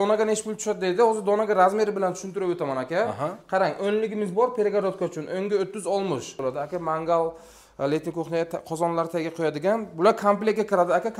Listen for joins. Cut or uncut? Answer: cut